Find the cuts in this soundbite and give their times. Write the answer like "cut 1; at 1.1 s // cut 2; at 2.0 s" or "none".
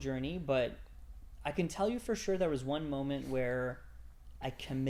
none